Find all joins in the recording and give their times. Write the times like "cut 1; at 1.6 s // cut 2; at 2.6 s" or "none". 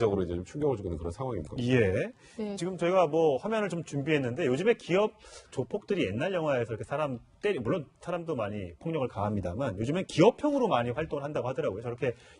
cut 1; at 4.6 s